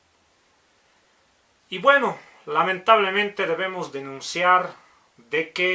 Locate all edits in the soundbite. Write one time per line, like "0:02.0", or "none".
0:02.1